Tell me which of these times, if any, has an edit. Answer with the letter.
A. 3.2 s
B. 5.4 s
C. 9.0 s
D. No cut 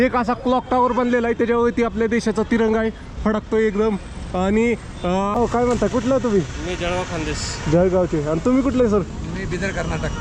B